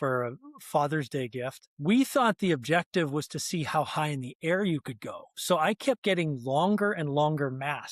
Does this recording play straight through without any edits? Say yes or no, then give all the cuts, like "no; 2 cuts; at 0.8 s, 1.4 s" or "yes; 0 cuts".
no; 1 cut; at 1.6 s